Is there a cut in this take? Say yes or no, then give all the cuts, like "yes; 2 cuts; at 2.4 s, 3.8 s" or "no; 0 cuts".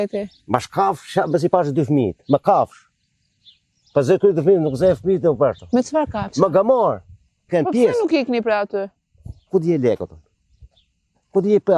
yes; 1 cut; at 7.5 s